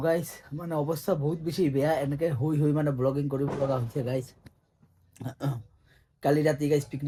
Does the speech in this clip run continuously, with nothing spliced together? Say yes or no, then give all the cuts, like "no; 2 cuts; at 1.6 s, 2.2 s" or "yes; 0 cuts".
yes; 0 cuts